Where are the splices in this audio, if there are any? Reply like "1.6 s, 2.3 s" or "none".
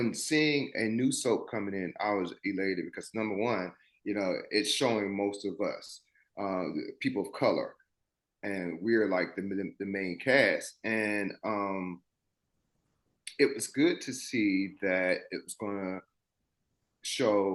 none